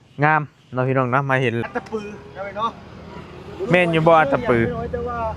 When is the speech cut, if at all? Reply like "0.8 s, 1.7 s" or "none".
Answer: 1.6 s